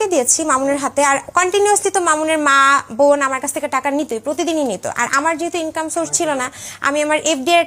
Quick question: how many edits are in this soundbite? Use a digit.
0